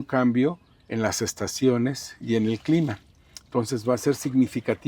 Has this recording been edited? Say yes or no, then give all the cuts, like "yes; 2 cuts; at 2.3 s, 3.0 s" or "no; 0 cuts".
no; 0 cuts